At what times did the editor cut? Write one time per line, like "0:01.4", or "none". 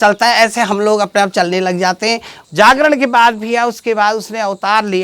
0:02.3